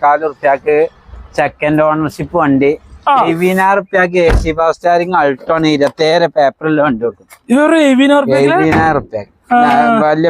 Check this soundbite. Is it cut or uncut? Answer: cut